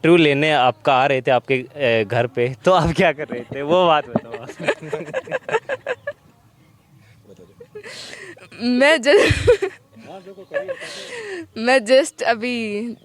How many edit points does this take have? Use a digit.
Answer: 0